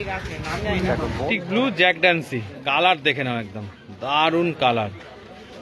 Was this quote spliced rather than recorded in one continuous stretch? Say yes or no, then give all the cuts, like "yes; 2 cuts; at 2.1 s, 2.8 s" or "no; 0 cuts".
yes; 1 cut; at 1.2 s